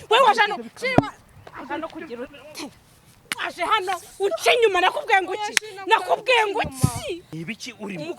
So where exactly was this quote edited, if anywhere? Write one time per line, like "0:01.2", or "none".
0:07.3